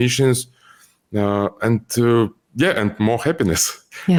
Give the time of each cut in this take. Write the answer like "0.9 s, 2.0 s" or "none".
none